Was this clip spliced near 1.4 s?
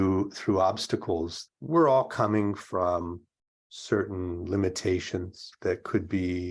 yes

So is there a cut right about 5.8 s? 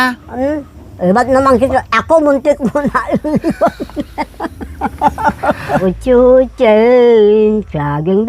yes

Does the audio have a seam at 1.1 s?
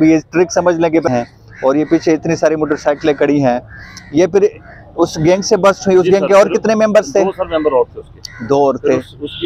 yes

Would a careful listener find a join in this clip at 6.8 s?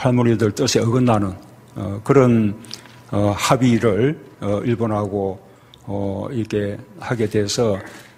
yes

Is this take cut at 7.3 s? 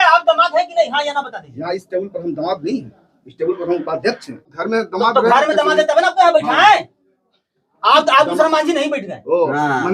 no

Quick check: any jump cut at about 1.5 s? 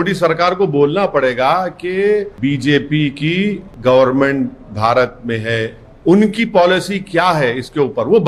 no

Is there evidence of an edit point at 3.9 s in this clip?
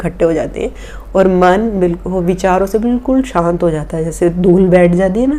no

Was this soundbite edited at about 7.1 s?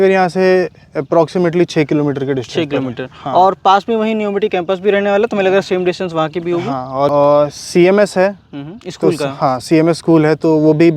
yes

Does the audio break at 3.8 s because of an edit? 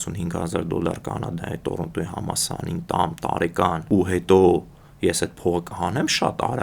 yes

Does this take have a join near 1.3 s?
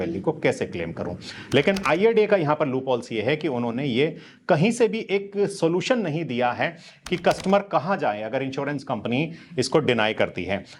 no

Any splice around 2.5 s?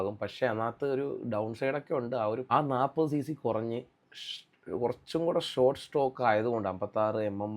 yes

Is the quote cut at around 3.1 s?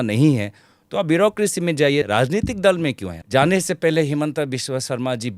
yes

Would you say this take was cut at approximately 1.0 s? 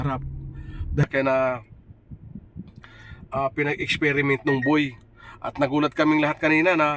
yes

